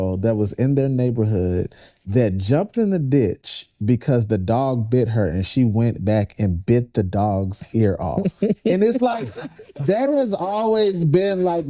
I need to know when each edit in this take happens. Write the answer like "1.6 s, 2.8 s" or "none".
none